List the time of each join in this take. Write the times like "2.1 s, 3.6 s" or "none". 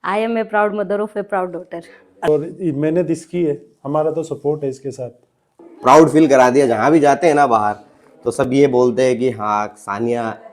2.3 s, 5.5 s